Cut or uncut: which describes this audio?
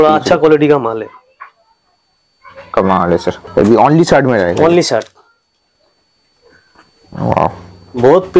cut